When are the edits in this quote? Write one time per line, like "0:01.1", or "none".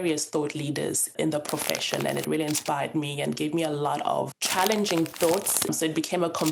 0:01.1
0:04.3
0:05.7